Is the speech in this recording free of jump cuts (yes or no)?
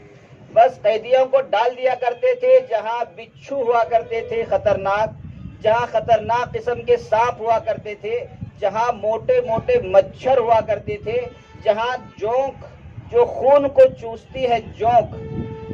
yes